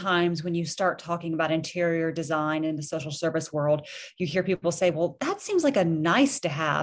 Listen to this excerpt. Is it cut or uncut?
cut